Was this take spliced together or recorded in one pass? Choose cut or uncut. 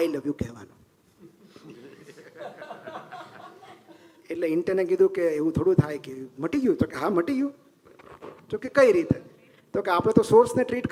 uncut